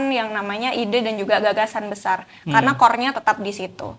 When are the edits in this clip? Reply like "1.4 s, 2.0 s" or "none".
none